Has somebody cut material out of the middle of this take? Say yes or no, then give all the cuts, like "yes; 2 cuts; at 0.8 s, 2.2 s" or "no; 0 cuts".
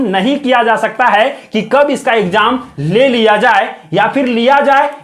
no; 0 cuts